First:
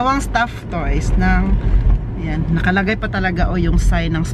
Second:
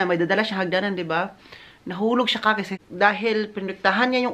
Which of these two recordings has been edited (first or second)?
second